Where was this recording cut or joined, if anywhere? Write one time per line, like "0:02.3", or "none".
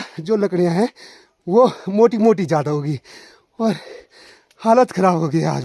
none